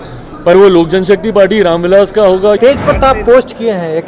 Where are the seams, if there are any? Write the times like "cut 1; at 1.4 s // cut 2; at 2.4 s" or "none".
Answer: cut 1; at 2.6 s